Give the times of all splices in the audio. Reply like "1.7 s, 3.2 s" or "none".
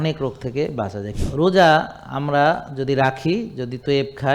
1.0 s